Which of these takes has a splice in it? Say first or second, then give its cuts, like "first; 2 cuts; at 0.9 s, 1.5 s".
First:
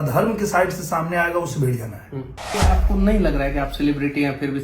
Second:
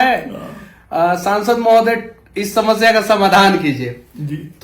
first; 1 cut; at 2.6 s